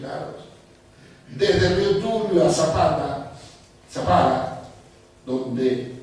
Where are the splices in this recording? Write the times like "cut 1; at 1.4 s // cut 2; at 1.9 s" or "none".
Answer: cut 1; at 3.0 s